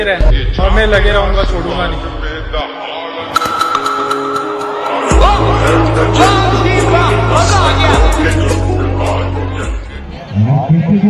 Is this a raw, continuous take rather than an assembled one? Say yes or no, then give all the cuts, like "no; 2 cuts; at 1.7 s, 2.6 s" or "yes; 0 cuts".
yes; 0 cuts